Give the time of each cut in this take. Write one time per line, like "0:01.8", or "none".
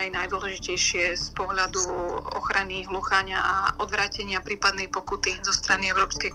none

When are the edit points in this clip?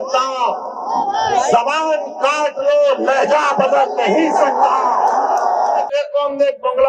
0:05.9

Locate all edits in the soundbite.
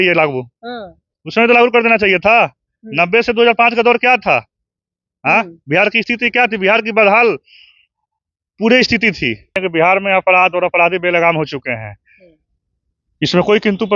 0:09.6

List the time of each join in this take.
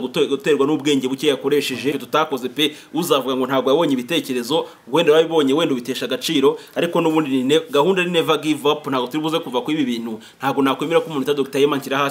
0:02.0

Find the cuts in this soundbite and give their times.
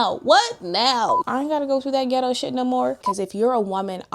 0:01.2
0:03.1

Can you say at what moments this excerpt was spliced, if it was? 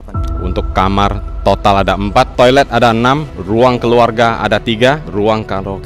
0:02.3
0:03.3
0:05.1

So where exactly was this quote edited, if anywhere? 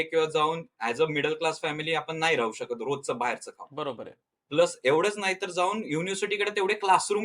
none

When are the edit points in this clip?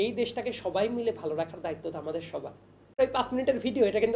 0:03.0

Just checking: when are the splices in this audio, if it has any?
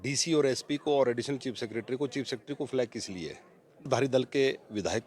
0:03.9

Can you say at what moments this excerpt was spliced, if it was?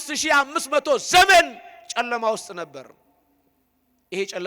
none

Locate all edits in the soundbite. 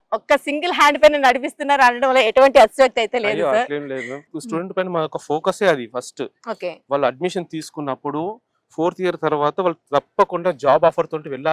0:04.3

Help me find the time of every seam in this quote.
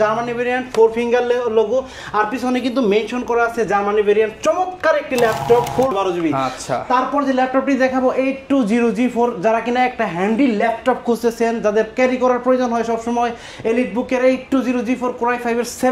0:05.9

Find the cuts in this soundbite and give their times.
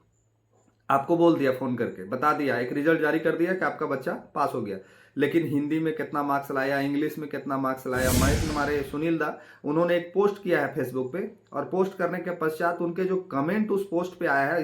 0:08.5

